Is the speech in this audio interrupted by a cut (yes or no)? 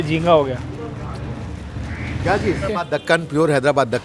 yes